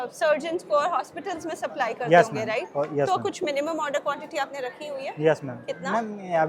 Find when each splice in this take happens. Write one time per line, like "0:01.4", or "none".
none